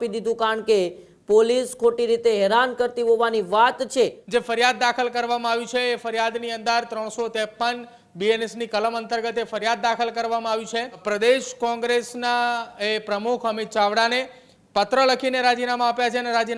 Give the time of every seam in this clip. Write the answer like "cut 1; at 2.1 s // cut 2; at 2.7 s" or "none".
cut 1; at 4.2 s // cut 2; at 11.0 s